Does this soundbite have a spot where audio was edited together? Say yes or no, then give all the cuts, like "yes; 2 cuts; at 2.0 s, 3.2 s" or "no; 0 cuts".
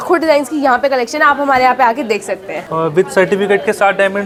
no; 0 cuts